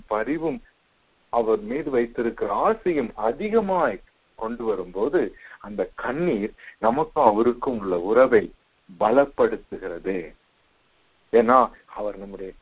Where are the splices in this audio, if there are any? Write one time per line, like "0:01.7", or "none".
none

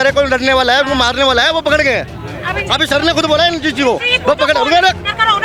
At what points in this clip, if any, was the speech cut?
none

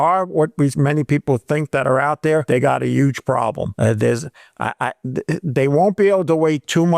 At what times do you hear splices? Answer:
0:02.4

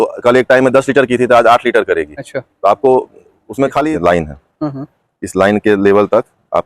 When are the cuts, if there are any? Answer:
0:03.8

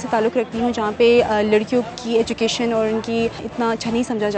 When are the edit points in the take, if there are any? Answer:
0:03.4

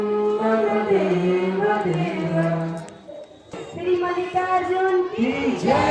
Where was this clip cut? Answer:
0:03.7

